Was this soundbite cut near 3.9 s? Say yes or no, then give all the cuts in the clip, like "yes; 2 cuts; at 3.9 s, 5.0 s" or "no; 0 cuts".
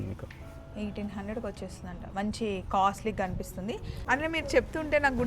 yes; 1 cut; at 3.9 s